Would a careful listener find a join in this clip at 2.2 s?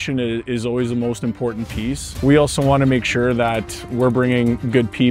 yes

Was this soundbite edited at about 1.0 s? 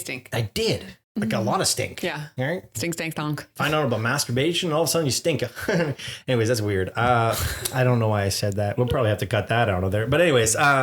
yes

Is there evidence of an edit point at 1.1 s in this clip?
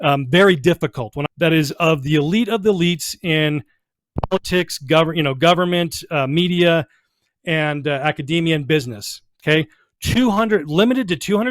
yes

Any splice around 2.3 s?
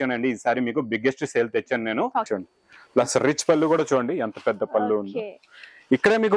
yes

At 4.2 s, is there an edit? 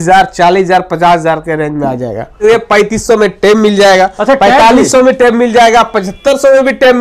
no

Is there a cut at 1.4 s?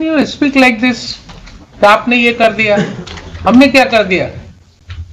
no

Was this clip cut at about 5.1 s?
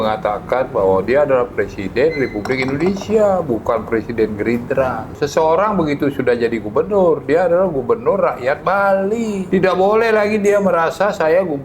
yes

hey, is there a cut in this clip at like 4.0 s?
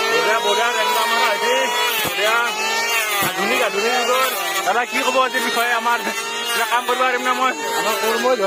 no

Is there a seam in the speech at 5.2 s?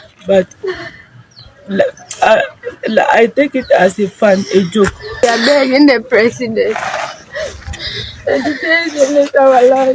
yes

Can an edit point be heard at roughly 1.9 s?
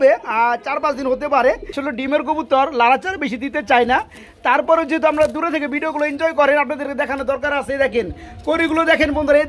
yes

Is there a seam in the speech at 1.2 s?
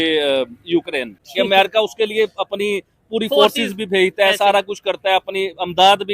yes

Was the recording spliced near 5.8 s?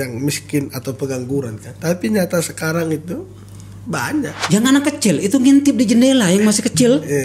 no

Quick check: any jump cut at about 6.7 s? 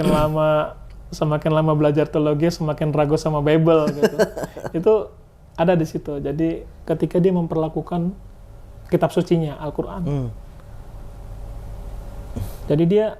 yes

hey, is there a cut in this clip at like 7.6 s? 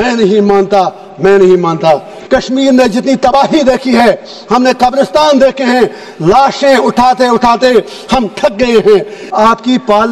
no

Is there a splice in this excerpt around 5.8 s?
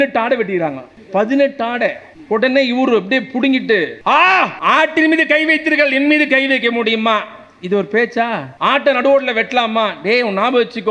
no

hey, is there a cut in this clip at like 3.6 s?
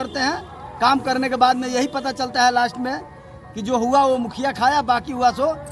no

